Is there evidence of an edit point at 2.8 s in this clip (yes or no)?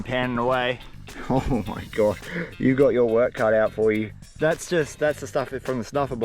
no